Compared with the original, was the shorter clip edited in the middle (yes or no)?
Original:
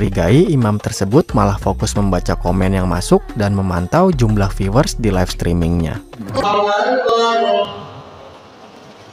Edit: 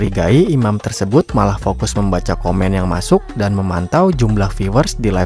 no